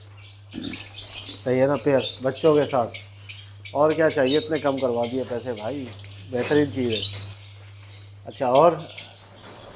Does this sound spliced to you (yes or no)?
no